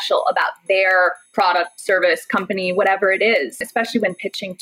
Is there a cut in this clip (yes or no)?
yes